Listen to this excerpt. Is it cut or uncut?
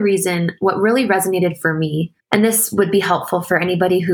cut